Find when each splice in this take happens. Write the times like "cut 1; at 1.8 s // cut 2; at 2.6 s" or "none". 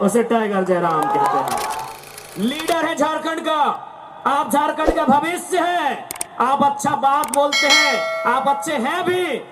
cut 1; at 1.8 s